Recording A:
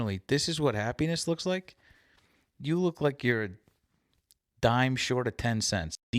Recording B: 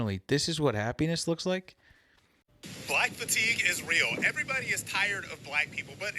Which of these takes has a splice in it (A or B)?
B